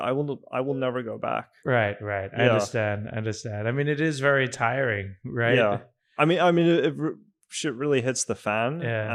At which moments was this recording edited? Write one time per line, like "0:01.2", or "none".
none